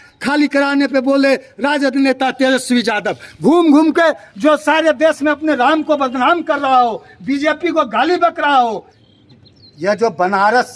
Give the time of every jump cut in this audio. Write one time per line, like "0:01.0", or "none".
0:08.9

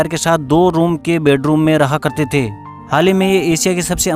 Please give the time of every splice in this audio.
0:02.6

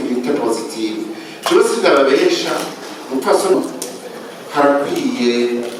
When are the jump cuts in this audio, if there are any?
0:03.6

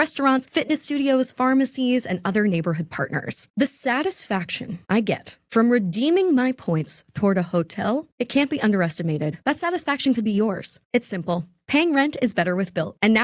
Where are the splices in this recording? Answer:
none

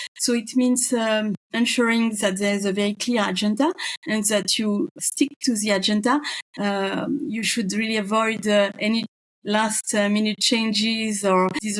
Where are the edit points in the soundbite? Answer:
none

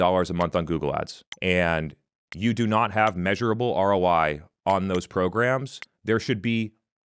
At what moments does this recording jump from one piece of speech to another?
0:01.2

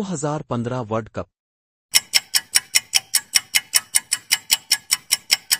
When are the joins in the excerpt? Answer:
0:01.7

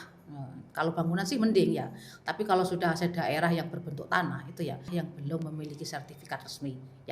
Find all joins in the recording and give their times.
0:05.0

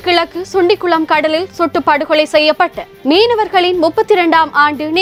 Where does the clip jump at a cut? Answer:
none

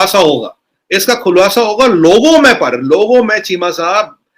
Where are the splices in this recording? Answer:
none

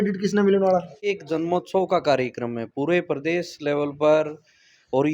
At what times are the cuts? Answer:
0:00.9

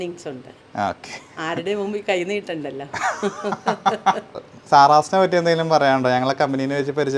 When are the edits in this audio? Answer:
0:04.3

